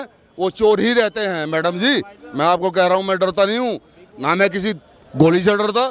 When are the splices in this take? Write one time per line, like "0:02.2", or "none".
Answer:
none